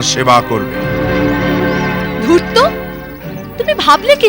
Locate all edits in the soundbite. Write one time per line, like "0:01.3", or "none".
none